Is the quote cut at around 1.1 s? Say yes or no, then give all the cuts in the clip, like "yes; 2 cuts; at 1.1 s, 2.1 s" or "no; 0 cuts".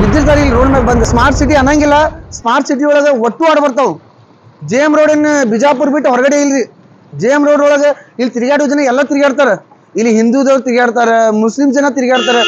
yes; 1 cut; at 1.1 s